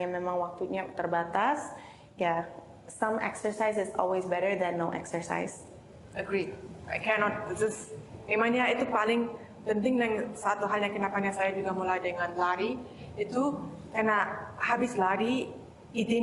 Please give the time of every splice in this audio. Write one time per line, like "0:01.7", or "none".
none